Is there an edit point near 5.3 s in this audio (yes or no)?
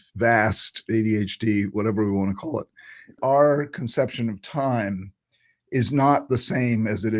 no